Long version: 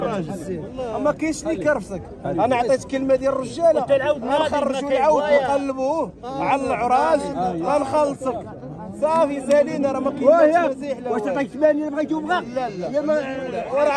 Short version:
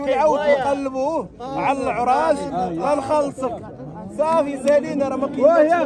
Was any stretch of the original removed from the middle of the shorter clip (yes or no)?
no